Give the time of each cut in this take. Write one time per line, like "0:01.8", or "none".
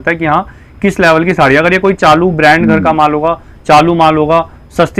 none